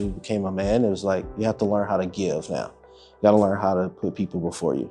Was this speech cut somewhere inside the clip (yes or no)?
no